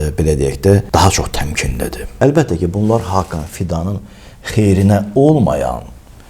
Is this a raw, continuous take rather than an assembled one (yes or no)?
no